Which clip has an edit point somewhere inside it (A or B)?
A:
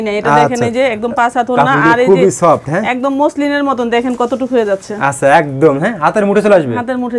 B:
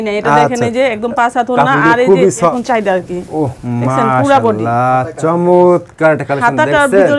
B